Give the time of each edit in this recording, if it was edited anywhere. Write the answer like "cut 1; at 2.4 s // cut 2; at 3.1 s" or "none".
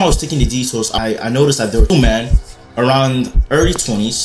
cut 1; at 0.9 s // cut 2; at 1.9 s